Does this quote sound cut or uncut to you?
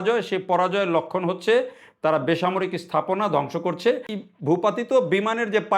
cut